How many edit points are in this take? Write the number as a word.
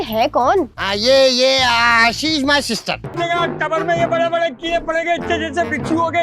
one